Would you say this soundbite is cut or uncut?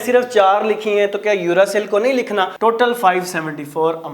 cut